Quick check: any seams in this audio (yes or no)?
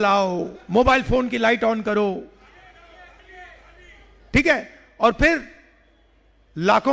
no